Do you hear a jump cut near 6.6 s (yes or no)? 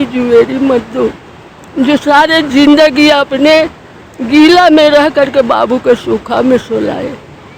no